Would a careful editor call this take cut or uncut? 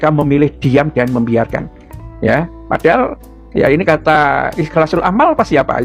uncut